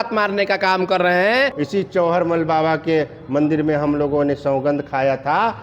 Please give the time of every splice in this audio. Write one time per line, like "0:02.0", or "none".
0:01.6